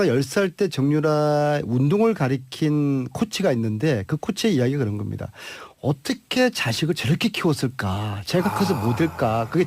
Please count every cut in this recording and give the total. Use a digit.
1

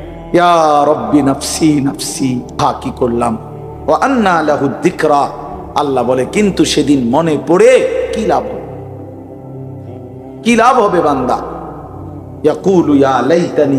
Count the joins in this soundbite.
1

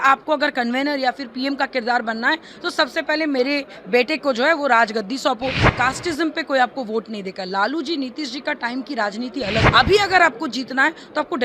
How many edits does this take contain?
2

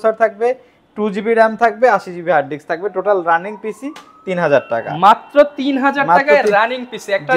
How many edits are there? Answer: 0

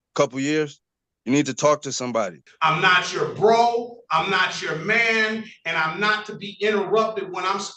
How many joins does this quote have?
1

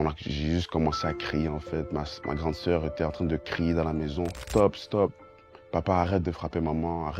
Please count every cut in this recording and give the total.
1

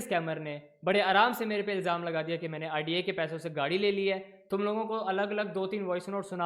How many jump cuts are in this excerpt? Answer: 0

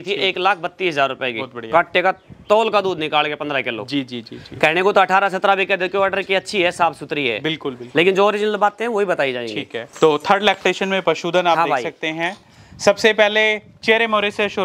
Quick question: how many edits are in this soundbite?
0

